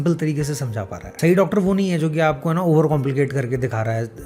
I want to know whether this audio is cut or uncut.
cut